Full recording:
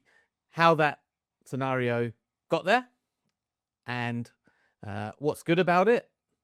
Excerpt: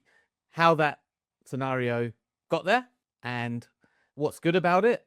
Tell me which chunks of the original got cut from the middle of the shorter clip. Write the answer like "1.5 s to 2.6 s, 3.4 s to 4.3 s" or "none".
3.0 s to 3.7 s, 4.7 s to 5.1 s